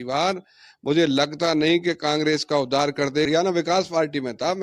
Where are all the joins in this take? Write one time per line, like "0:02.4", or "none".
0:03.3